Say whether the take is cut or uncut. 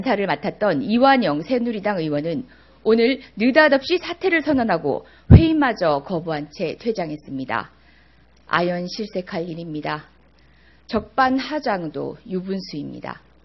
uncut